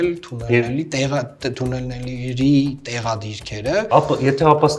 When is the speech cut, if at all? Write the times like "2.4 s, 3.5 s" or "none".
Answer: 3.9 s